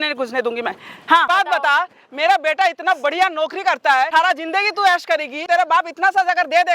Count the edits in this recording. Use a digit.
3